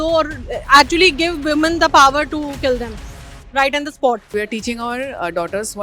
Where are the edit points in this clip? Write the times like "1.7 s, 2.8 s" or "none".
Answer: 4.3 s